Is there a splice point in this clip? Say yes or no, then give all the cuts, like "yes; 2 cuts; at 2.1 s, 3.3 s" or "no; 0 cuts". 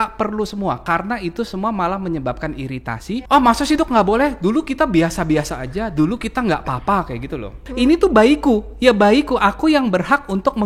yes; 2 cuts; at 2.9 s, 7.6 s